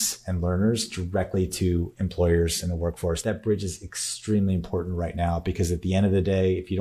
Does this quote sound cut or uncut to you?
cut